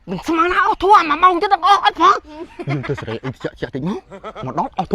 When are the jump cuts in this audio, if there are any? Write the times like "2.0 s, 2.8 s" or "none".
2.6 s